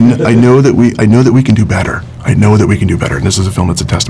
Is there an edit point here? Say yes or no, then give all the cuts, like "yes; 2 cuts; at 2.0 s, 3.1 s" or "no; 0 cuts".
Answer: no; 0 cuts